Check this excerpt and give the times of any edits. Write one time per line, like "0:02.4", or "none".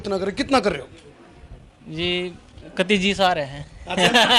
none